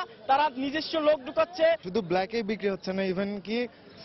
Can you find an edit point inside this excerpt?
yes; 1 cut; at 1.9 s

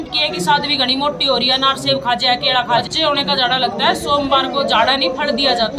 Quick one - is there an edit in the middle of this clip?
yes; 1 cut; at 2.8 s

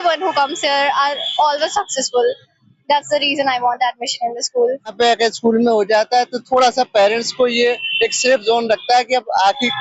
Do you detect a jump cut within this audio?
yes; 1 cut; at 4.9 s

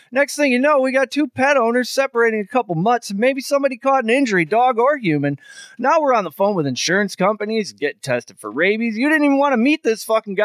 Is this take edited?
no; 0 cuts

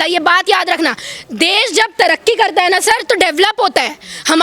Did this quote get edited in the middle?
no; 0 cuts

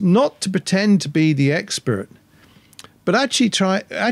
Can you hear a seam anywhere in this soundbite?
no; 0 cuts

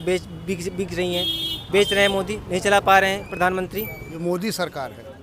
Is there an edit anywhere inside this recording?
yes; 1 cut; at 4.0 s

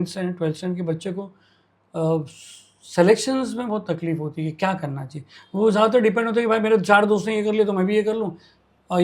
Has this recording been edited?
no; 0 cuts

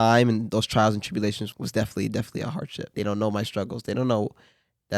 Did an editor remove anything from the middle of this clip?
yes; 2 cuts; at 1.5 s, 2.9 s

